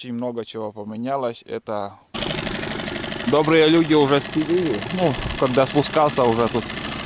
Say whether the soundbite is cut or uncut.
cut